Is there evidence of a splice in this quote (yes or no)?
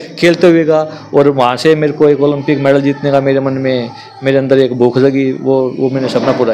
no